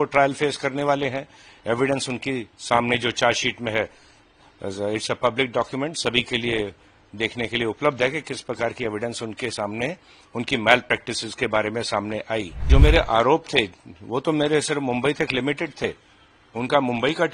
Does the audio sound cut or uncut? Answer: cut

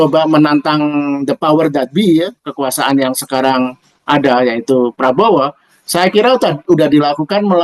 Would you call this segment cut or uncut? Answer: uncut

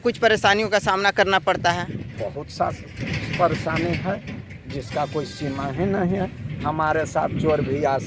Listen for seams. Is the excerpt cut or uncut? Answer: uncut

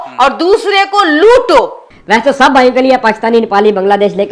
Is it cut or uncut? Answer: cut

